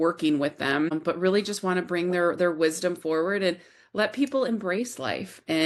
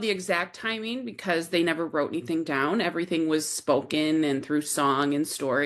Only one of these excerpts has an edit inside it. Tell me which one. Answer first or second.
first